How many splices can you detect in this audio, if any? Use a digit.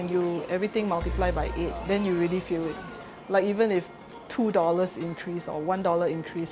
1